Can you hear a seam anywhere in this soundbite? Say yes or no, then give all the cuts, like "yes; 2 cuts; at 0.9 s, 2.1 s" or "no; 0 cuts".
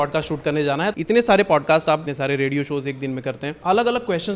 yes; 3 cuts; at 0.9 s, 2.1 s, 3.5 s